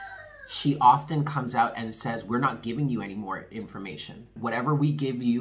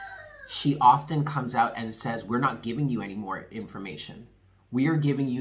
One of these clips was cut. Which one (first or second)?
first